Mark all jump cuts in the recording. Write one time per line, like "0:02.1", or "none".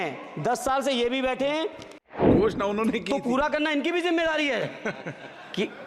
0:02.2